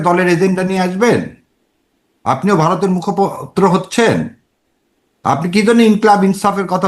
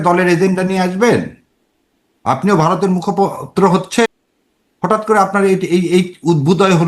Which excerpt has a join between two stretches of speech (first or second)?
second